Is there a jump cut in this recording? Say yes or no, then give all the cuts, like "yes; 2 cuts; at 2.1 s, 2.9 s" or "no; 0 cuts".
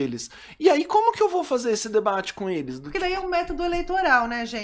no; 0 cuts